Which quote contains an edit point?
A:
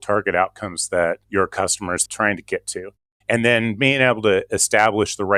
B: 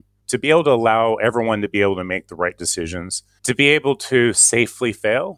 A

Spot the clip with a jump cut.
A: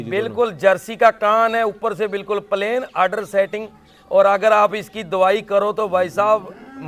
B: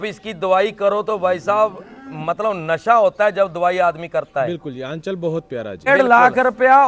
B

